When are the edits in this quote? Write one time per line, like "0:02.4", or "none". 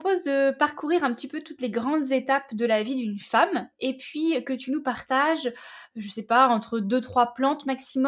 none